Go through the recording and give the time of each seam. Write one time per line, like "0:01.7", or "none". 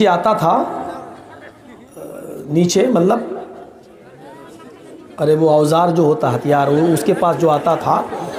none